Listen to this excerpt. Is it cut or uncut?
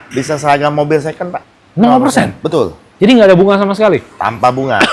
cut